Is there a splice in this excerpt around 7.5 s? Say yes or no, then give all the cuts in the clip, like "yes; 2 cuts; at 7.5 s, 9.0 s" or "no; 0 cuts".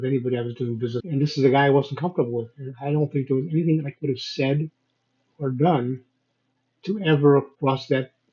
yes; 2 cuts; at 1.0 s, 7.5 s